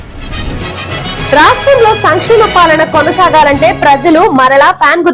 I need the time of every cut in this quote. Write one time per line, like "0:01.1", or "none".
0:01.3